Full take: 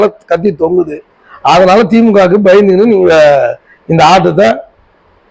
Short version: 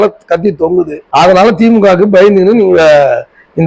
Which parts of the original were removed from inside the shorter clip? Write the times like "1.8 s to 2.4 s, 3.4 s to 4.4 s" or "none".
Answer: 1.0 s to 1.3 s